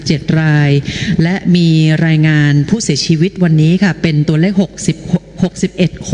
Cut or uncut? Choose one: uncut